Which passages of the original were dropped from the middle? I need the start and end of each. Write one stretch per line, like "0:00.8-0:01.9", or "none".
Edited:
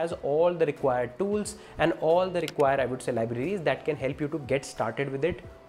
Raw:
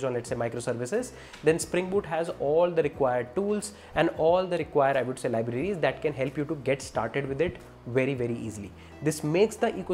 none